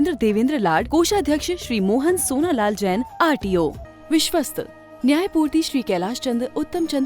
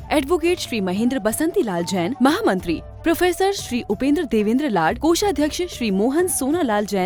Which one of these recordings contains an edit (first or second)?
first